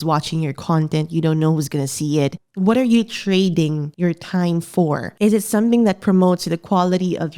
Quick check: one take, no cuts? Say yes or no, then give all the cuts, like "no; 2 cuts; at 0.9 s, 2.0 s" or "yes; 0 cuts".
no; 2 cuts; at 2.4 s, 3.8 s